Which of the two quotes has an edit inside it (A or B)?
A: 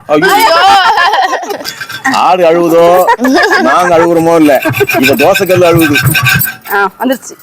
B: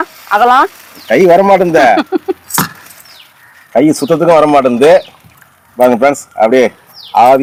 A